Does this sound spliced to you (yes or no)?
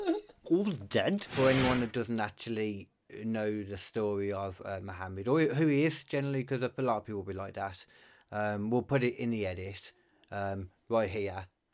yes